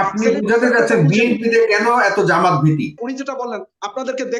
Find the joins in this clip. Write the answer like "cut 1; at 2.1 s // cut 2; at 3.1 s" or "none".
cut 1; at 3.0 s